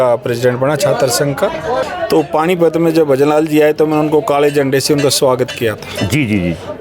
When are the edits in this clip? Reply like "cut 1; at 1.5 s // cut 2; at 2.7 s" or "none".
cut 1; at 1.8 s